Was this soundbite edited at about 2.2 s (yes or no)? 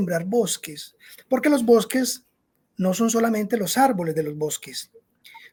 no